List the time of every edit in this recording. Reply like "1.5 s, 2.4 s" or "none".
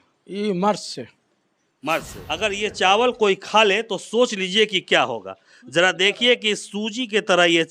2.2 s